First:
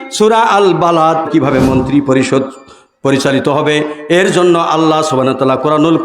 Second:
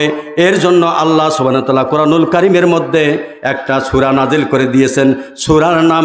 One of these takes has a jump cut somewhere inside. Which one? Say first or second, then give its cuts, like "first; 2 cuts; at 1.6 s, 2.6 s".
first; 1 cut; at 1.3 s